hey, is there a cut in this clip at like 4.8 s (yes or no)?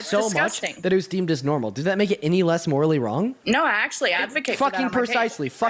no